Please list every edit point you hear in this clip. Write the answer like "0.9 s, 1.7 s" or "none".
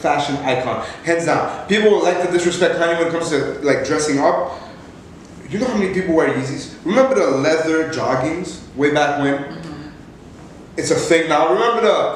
none

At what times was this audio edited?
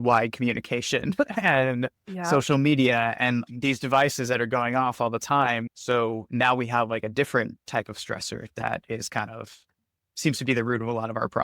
3.5 s, 5.7 s

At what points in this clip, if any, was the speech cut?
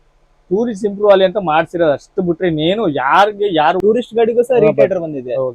3.8 s

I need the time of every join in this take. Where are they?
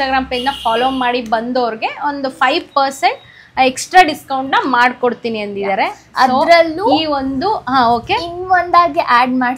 none

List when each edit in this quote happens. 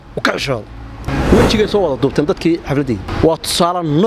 1.1 s, 3.1 s

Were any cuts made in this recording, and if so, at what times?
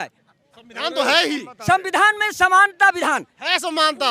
none

